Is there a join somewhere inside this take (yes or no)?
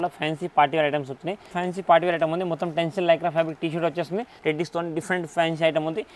yes